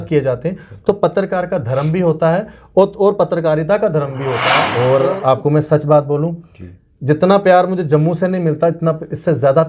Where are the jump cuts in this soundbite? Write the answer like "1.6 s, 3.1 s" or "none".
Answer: 4.6 s